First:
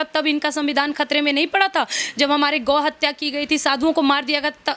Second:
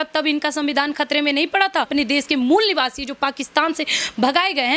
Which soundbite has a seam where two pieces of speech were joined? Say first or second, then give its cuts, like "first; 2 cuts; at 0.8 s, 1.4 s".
second; 1 cut; at 1.9 s